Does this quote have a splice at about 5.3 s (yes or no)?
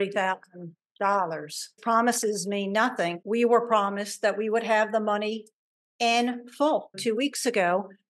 no